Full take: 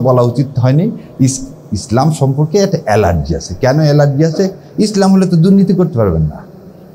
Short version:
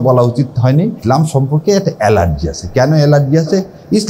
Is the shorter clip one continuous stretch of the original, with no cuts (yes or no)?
no